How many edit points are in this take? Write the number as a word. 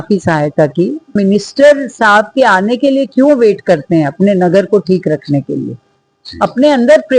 one